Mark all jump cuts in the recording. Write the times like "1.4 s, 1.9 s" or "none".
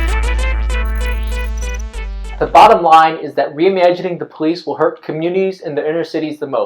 2.2 s